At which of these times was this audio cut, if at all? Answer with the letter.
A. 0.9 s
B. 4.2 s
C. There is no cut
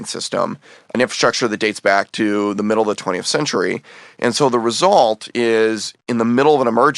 A